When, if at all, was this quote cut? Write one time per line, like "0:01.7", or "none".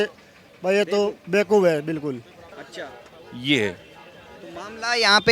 0:02.7